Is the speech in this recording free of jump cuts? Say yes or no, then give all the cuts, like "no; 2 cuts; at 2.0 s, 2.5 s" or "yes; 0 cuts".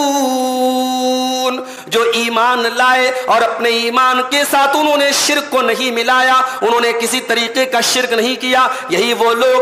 yes; 0 cuts